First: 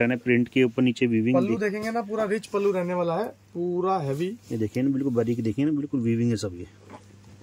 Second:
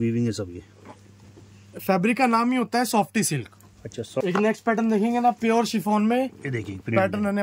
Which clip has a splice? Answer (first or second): second